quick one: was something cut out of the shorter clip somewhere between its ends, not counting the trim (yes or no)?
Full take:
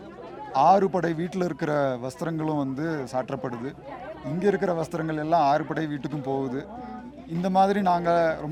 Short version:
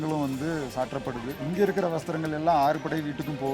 yes